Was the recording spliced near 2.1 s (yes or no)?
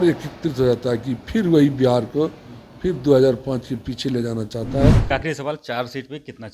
no